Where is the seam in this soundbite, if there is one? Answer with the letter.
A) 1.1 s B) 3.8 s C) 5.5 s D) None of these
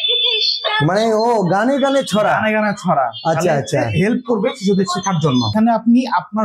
C